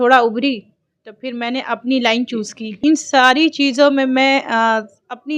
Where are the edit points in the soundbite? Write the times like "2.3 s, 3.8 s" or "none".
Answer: 2.8 s